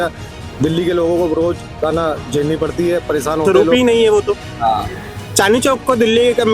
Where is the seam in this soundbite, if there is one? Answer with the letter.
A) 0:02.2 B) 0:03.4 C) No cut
B